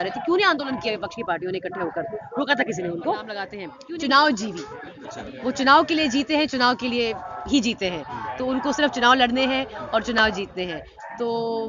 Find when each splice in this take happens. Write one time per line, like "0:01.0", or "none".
0:03.7